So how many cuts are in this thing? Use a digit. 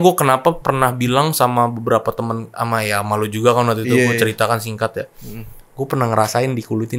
0